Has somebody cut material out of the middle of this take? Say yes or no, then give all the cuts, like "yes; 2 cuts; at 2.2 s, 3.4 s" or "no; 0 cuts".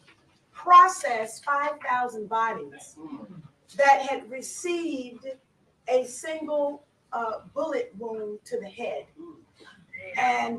no; 0 cuts